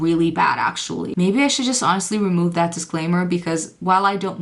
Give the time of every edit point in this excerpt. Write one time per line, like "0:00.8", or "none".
0:01.1